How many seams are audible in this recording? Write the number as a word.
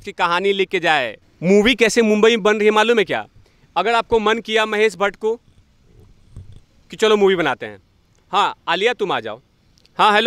one